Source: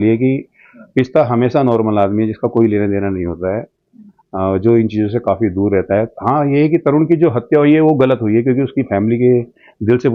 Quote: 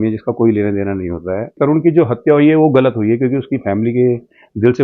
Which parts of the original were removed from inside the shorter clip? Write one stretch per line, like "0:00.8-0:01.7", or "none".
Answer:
0:03.7-0:06.8